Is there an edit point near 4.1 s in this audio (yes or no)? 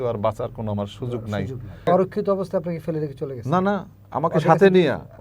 no